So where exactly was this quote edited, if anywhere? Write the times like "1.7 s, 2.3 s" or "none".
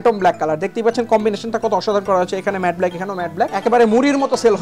3.5 s